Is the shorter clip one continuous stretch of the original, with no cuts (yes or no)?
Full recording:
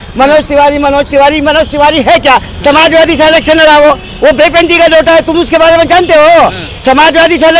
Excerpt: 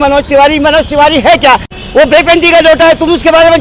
no